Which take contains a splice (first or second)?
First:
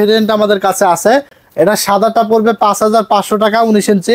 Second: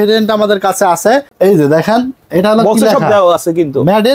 second